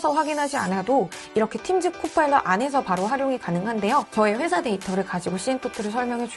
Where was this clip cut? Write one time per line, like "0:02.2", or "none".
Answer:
0:04.1